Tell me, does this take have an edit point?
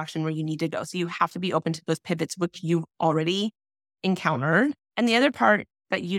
yes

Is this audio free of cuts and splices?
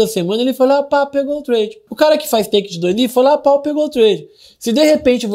no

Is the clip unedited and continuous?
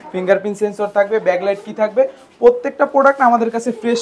yes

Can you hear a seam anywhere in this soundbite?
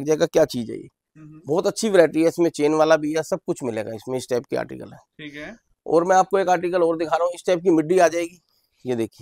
no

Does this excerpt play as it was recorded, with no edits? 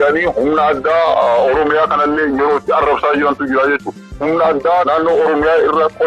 no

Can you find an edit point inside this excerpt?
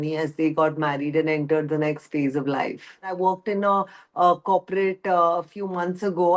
yes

